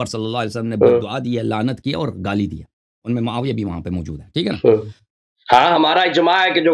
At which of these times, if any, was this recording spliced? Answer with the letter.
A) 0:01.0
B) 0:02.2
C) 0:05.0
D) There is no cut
C